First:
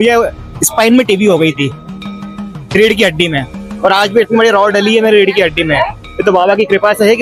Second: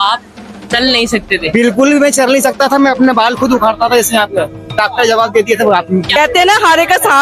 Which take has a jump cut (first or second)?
second